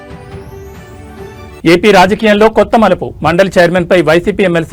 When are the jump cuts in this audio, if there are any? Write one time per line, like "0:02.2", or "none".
none